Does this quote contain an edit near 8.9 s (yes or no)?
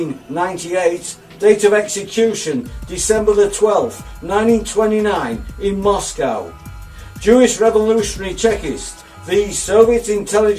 no